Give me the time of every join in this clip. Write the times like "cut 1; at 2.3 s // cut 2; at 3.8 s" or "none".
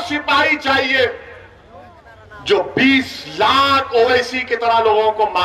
none